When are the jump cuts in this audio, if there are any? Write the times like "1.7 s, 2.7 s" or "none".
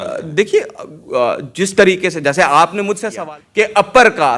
3.1 s